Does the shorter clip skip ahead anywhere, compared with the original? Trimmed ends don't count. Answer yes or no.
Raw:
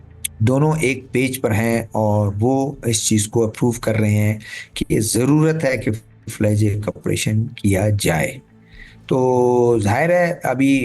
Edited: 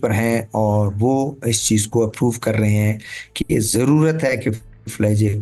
no